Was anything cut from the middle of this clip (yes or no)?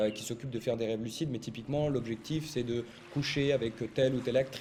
no